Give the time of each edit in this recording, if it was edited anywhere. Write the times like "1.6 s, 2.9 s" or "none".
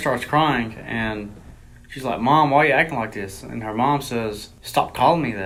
none